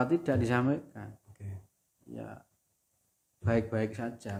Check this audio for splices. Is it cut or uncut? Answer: uncut